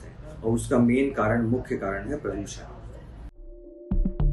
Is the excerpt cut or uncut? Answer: cut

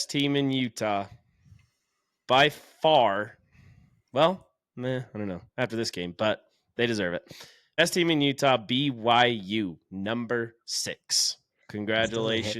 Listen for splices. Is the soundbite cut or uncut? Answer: cut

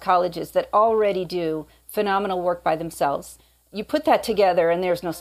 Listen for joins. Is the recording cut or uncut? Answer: uncut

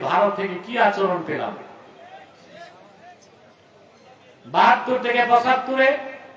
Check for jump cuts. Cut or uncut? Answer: uncut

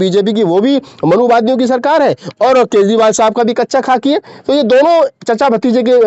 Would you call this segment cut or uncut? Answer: uncut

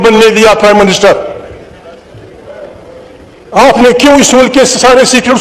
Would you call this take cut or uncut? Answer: uncut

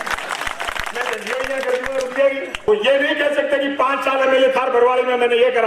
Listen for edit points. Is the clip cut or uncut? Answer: cut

